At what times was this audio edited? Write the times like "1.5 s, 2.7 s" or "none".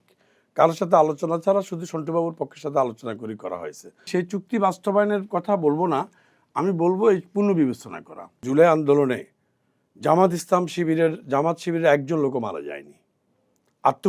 4.1 s, 8.4 s